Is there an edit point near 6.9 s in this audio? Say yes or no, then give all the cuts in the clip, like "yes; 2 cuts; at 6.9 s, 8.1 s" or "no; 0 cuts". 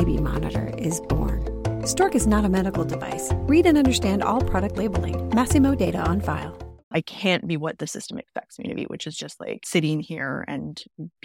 yes; 1 cut; at 6.9 s